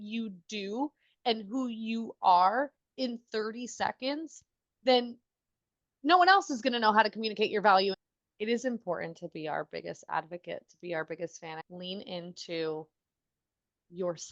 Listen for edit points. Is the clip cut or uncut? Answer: cut